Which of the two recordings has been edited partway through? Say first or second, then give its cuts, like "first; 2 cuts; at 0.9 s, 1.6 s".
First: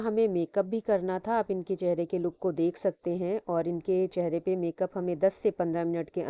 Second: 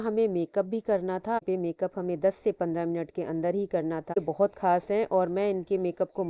second; 2 cuts; at 1.4 s, 4.2 s